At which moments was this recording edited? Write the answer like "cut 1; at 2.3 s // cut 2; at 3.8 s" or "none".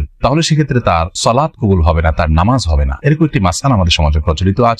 none

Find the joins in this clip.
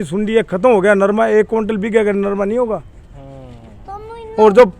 none

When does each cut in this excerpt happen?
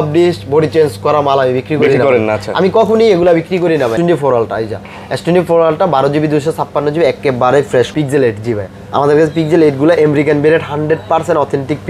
cut 1; at 3.9 s // cut 2; at 7.9 s

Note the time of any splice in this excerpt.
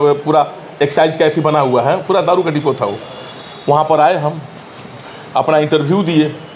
none

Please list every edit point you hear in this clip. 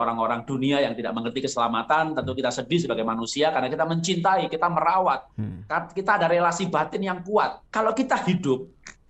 cut 1; at 7.6 s

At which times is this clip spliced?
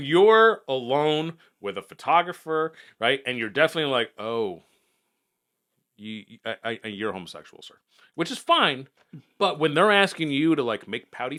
none

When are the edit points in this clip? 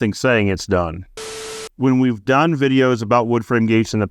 cut 1; at 1.5 s

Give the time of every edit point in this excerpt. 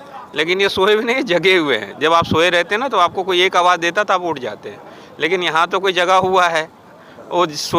none

